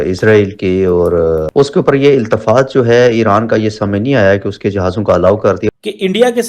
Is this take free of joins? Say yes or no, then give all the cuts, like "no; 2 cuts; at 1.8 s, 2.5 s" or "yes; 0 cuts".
no; 2 cuts; at 1.5 s, 5.7 s